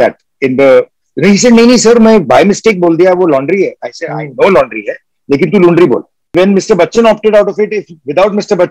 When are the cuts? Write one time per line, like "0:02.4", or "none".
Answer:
0:06.3

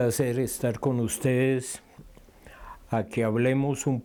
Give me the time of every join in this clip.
none

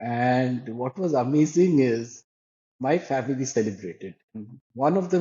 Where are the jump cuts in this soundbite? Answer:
0:02.7
0:04.4

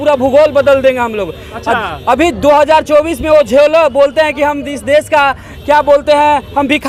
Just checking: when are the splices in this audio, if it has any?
none

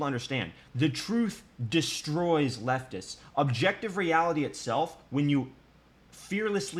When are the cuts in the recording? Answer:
none

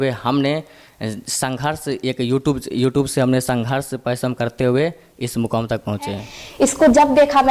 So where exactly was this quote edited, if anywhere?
0:06.3

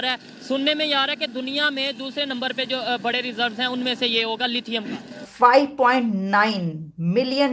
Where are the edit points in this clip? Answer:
0:05.2

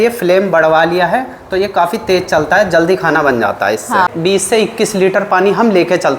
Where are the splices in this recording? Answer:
0:04.1

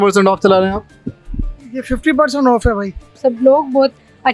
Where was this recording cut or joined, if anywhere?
0:03.2

